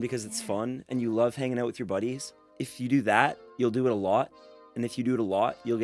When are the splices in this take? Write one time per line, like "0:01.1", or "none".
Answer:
0:02.6
0:03.4